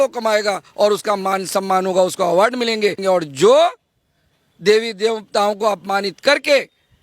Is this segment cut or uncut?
cut